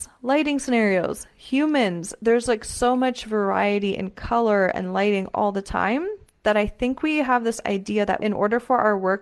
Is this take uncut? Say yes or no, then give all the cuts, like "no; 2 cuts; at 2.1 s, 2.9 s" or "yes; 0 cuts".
no; 1 cut; at 8.2 s